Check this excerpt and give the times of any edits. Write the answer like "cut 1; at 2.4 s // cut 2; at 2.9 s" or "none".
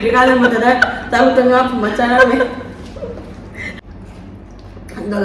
cut 1; at 3.7 s